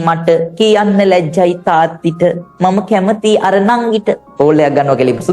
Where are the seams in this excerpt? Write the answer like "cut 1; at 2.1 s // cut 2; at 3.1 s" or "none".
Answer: cut 1; at 4.3 s